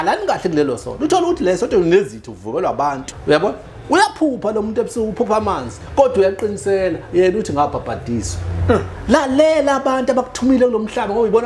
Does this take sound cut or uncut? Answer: cut